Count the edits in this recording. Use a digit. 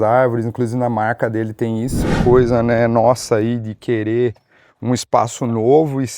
1